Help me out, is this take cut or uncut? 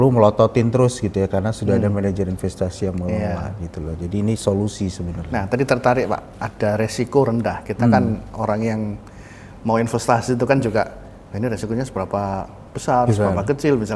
uncut